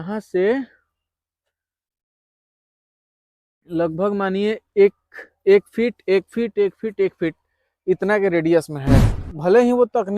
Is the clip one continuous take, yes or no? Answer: no